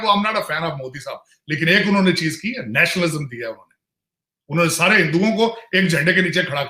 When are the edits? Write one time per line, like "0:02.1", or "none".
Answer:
none